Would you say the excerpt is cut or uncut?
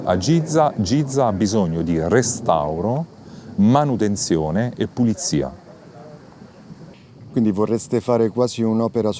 uncut